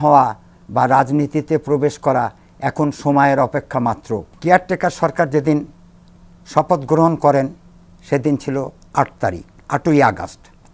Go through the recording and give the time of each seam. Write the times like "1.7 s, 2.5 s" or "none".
4.3 s